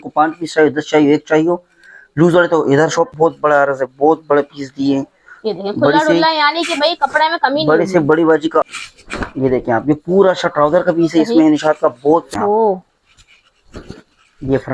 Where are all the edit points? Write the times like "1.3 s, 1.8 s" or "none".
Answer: 3.1 s, 8.7 s, 12.3 s